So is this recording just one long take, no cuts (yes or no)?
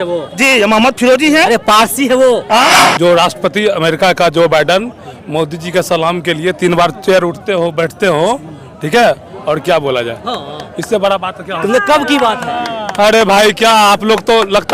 no